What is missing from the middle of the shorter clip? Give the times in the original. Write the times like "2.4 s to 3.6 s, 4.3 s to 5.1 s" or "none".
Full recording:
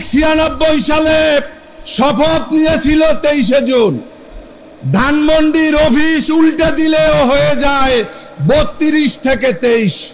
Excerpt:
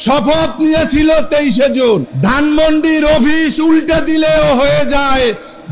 4.0 s to 4.8 s